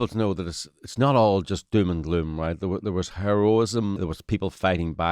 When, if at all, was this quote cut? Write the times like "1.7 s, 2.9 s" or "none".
4.0 s